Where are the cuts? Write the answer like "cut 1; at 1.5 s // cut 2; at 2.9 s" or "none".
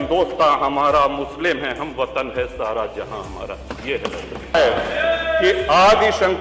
cut 1; at 4.5 s